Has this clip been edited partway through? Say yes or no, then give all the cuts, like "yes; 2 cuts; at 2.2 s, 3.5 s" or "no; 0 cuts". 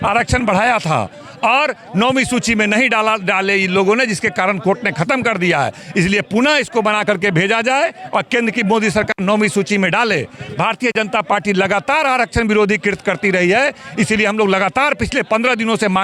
no; 0 cuts